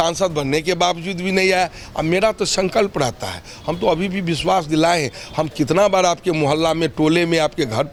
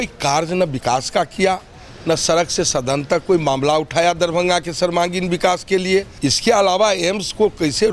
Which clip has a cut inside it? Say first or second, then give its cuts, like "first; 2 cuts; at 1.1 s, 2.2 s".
second; 1 cut; at 6.1 s